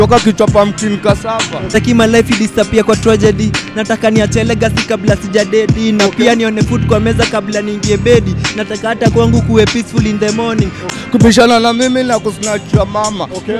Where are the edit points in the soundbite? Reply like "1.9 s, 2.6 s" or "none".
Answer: 1.7 s, 10.9 s